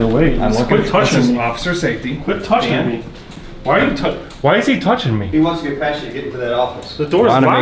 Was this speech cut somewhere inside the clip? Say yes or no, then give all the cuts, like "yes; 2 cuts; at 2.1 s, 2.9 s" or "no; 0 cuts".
no; 0 cuts